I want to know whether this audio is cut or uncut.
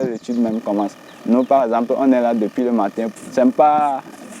cut